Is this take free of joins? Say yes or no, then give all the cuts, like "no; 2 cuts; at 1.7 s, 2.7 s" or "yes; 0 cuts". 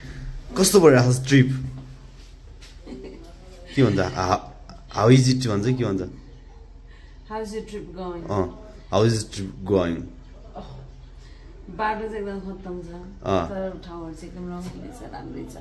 yes; 0 cuts